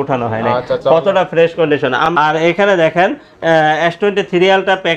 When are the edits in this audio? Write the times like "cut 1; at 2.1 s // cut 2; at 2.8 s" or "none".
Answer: cut 1; at 2.0 s